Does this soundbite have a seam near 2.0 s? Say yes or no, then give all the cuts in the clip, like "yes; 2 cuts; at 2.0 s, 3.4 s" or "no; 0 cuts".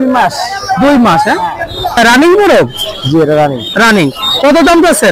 yes; 1 cut; at 2.0 s